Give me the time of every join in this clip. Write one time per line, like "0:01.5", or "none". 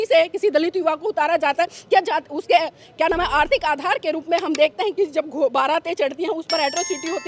none